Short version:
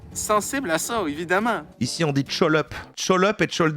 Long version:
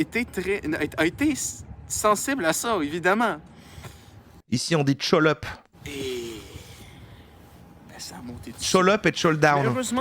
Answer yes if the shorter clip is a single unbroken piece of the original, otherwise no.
no